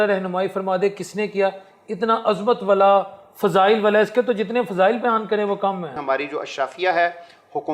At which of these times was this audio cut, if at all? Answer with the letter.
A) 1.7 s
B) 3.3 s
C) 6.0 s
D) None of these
C